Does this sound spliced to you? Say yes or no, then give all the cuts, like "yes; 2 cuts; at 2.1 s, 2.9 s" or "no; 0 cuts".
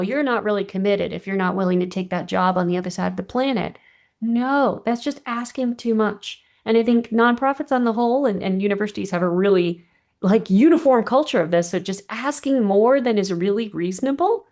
no; 0 cuts